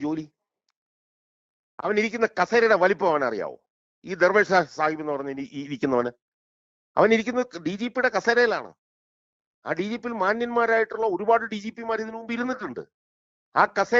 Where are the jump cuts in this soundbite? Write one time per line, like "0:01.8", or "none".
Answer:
none

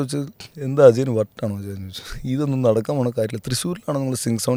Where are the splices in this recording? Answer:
none

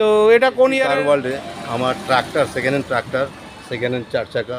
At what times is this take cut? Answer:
0:00.9

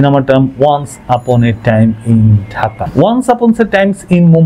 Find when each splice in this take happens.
0:02.8

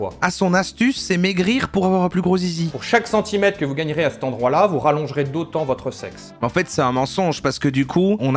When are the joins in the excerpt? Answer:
0:06.3

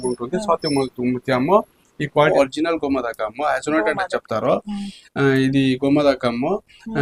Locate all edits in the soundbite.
0:02.3

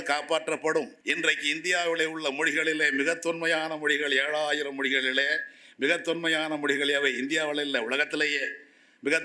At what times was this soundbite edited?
0:01.0

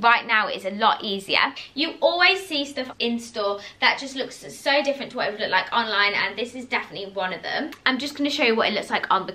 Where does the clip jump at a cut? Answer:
0:01.6
0:07.8

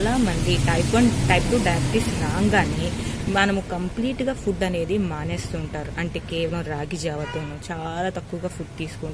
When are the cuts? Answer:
none

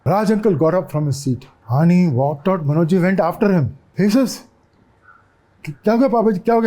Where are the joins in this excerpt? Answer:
0:01.5
0:03.8

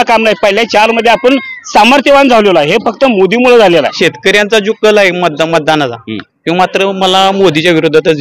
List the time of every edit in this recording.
0:03.9

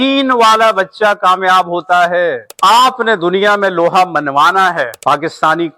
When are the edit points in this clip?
0:02.5

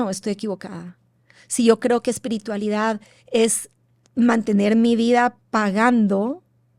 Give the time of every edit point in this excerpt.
0:05.4

